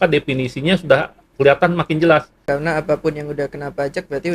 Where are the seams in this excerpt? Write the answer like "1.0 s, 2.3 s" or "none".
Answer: 2.4 s

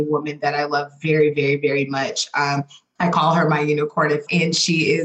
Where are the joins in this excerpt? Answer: 2.8 s, 4.3 s

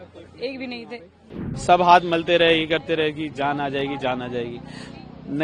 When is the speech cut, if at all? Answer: 1.4 s

